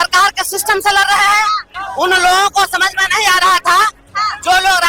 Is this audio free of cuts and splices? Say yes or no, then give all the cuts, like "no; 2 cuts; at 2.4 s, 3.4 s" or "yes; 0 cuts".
no; 1 cut; at 1.6 s